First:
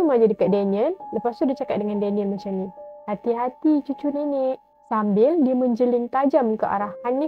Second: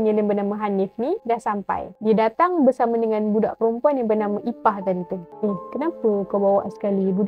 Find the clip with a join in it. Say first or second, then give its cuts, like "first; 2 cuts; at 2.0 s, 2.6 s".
second; 2 cuts; at 1.9 s, 5.2 s